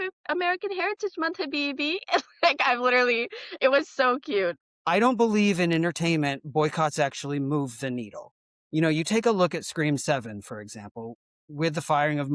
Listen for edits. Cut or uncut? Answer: cut